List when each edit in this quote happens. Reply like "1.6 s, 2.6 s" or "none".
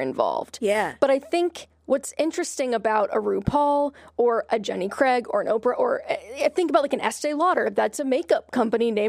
none